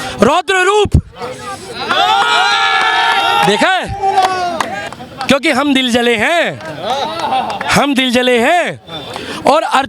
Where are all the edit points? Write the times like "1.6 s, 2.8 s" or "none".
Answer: 4.8 s